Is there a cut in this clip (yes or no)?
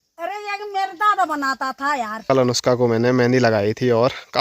yes